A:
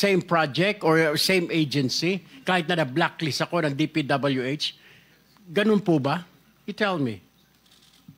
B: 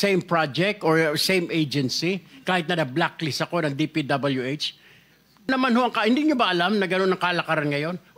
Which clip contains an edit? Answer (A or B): B